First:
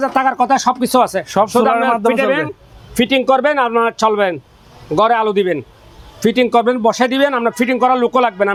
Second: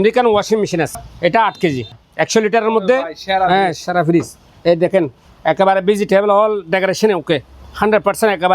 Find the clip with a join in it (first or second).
second